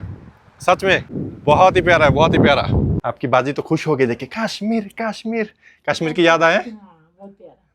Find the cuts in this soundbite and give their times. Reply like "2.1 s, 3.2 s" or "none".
1.1 s, 3.0 s

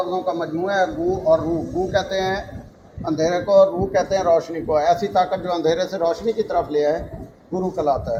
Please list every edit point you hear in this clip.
none

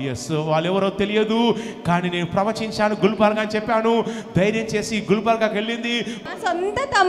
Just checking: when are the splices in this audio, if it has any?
6.2 s

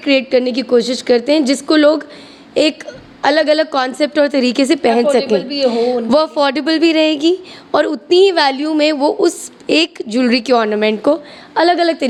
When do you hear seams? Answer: none

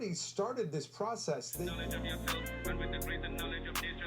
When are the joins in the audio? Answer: 1.7 s

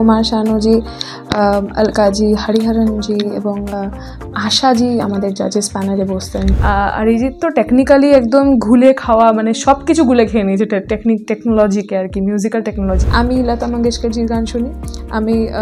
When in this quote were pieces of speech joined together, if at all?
6.6 s, 13.0 s

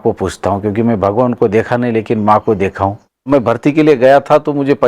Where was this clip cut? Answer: 3.3 s

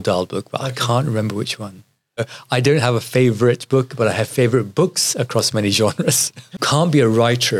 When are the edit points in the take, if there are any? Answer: 2.3 s, 6.6 s

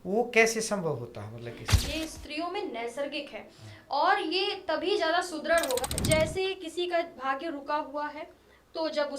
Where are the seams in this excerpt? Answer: 1.7 s, 5.8 s

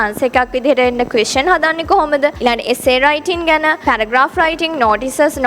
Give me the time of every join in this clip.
2.4 s

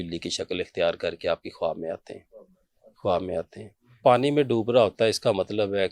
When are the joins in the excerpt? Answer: 4.0 s

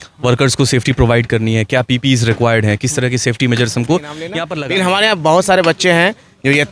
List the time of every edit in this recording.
4.4 s

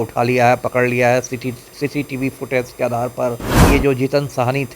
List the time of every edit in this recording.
3.6 s

